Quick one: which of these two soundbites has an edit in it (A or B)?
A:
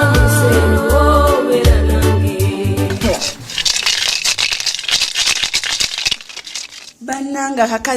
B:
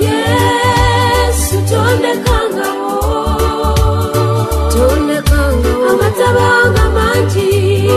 A